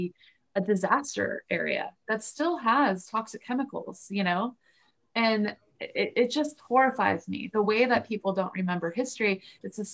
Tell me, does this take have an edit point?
no; 0 cuts

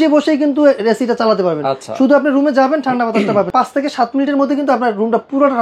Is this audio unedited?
no; 1 cut; at 3.5 s

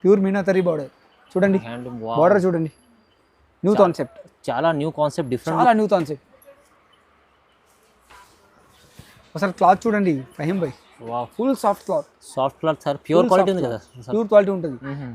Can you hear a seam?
no; 0 cuts

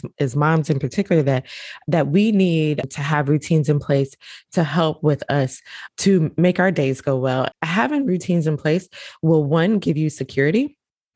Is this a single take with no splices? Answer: no; 3 cuts; at 2.9 s, 5.8 s, 7.5 s

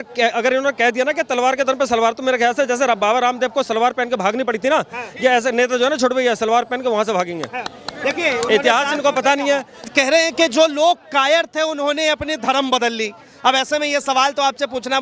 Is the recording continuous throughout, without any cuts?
no; 1 cut; at 9.9 s

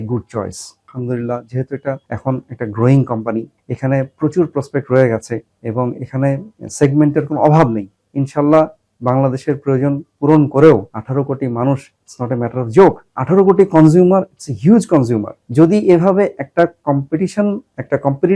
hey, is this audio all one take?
no; 4 cuts; at 0.9 s, 2.1 s, 6.6 s, 11.0 s

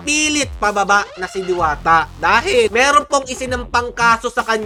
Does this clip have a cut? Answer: no; 0 cuts

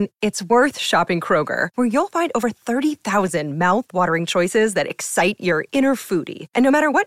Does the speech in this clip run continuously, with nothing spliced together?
yes; 0 cuts

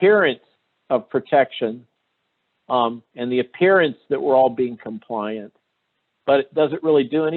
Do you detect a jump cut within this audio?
no; 0 cuts

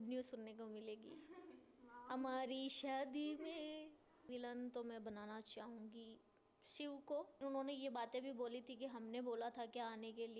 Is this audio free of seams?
no; 2 cuts; at 4.2 s, 7.4 s

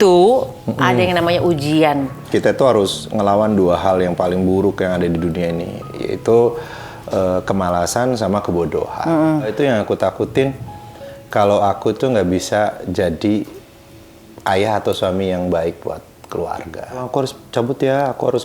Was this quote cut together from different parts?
yes; 3 cuts; at 2.2 s, 9.5 s, 17.0 s

